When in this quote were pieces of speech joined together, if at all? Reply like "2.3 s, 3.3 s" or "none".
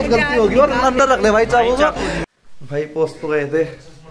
2.2 s